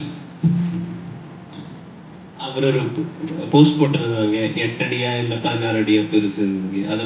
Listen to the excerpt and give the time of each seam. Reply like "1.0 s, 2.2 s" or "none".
none

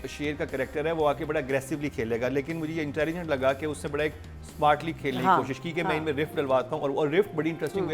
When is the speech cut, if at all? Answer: none

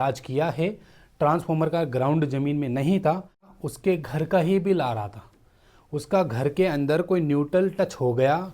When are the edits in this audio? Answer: 3.5 s

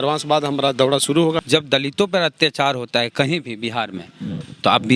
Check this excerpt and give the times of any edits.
1.4 s

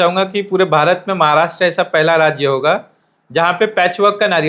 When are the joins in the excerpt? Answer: none

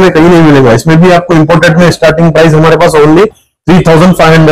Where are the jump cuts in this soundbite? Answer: none

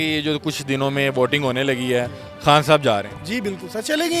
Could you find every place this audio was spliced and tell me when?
none

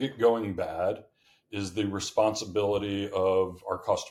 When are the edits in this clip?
none

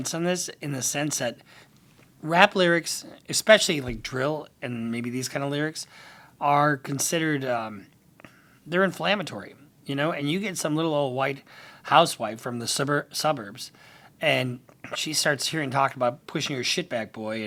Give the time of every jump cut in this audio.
none

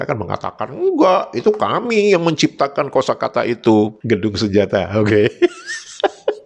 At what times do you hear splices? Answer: 4.0 s

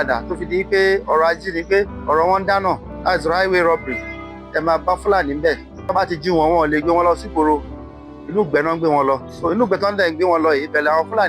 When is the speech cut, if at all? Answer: 2.0 s, 2.9 s, 5.8 s, 9.3 s

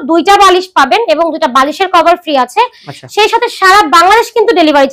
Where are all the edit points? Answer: none

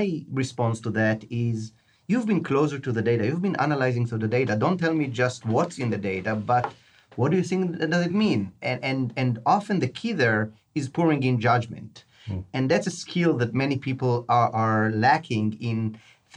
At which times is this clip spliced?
none

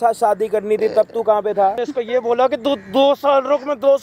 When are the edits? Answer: 1.8 s

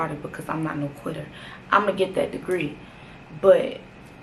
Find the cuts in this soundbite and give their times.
none

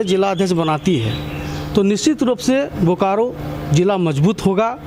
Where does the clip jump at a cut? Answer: none

